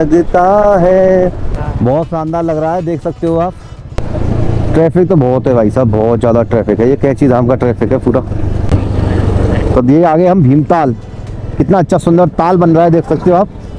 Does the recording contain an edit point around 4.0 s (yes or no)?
yes